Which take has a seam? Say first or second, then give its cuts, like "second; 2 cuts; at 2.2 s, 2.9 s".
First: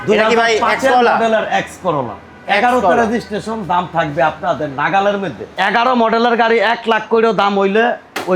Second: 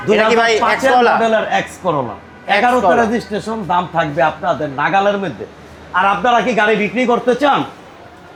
first; 1 cut; at 5.4 s